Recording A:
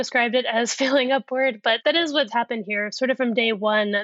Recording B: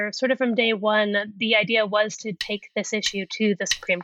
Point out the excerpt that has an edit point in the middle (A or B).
A